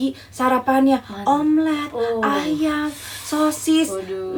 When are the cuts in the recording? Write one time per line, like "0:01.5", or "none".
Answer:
none